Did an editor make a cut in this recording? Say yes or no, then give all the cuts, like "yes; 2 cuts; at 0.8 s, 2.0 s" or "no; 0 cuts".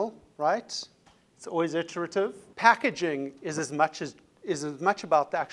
yes; 1 cut; at 2.4 s